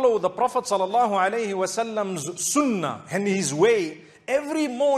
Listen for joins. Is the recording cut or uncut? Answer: uncut